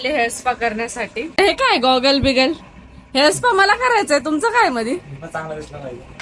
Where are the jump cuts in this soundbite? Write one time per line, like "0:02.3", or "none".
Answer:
0:01.4